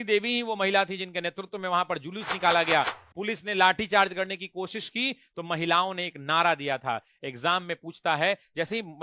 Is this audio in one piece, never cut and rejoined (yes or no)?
yes